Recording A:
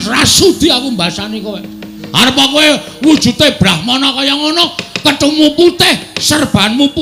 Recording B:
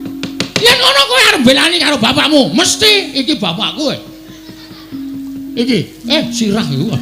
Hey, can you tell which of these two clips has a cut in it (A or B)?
B